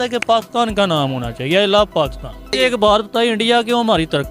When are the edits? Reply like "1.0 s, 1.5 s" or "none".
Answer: 2.5 s